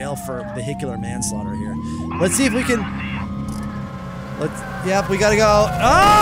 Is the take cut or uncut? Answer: uncut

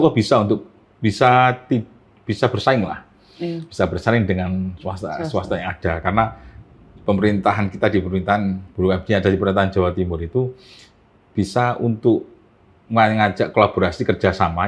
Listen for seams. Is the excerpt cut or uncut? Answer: uncut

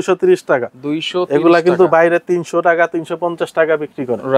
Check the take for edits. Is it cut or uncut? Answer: uncut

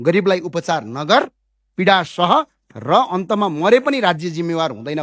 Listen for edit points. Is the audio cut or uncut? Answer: uncut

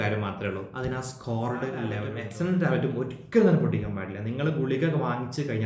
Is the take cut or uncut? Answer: cut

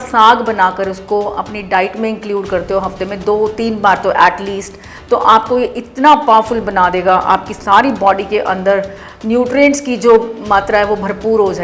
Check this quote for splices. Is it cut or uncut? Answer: uncut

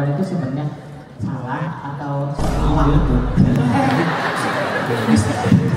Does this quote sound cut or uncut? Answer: uncut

